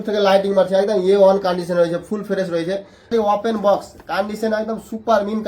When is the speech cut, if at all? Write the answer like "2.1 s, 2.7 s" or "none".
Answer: 3.1 s